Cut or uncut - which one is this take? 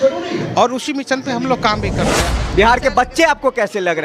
cut